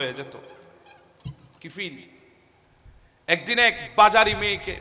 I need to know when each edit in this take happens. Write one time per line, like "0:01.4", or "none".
none